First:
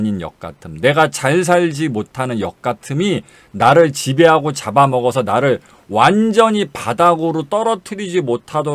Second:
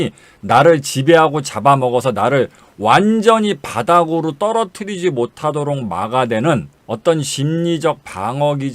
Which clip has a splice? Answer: second; 1 cut; at 6.8 s

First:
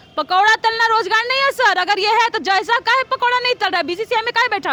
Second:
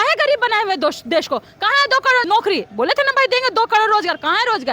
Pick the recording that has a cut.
second; 1 cut; at 2.2 s

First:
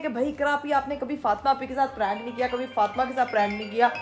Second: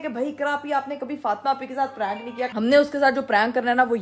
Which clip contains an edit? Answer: second; 1 cut; at 2.5 s

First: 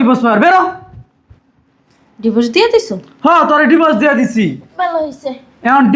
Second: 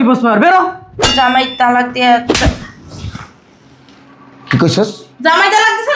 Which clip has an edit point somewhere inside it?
second; 1 cut; at 1.1 s

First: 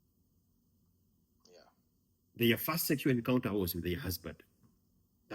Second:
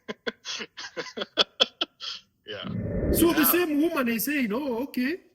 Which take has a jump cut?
second; 1 cut; at 3.0 s

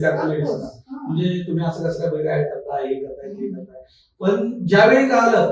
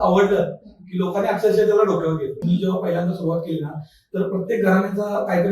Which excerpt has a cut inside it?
second; 1 cut; at 2.4 s

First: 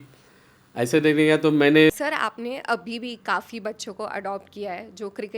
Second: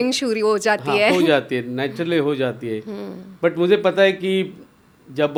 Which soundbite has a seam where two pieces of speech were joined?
first; 1 cut; at 1.9 s

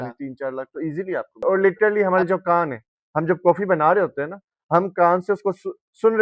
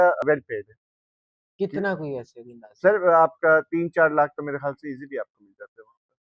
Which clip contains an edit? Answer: first; 1 cut; at 1.4 s

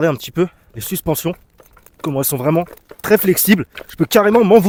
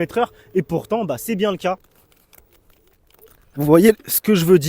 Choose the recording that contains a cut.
second; 1 cut; at 1.8 s

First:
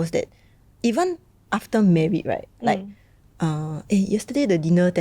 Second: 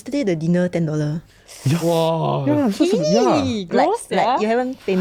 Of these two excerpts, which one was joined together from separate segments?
first; 1 cut; at 2.5 s

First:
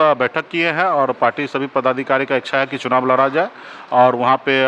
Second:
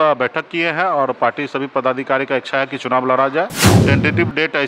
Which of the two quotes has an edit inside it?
second; 1 cut; at 3.7 s

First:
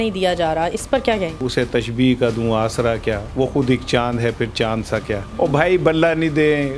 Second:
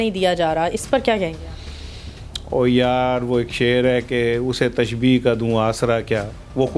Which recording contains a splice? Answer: first; 3 cuts; at 1.4 s, 3.2 s, 5.3 s

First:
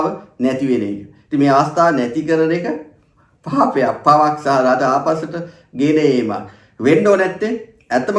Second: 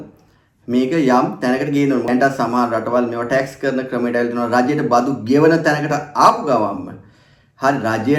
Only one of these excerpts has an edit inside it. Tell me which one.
second; 1 cut; at 2.1 s

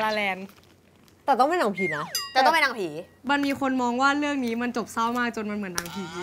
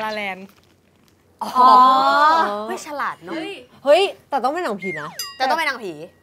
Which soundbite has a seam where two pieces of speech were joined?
first; 1 cut; at 1.2 s

